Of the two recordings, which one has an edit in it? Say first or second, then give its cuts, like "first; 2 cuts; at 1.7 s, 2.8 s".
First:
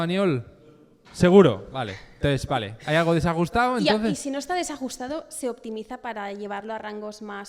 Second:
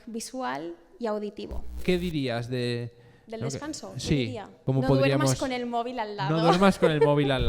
second; 2 cuts; at 1.8 s, 4.5 s